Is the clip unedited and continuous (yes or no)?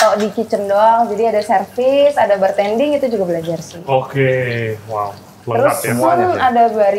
yes